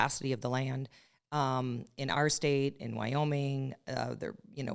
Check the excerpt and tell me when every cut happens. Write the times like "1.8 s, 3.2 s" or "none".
none